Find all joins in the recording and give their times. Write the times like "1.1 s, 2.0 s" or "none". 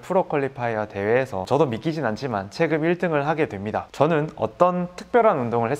1.4 s, 3.8 s